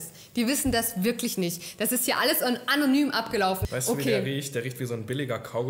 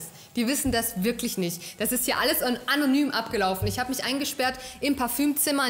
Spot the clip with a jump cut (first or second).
first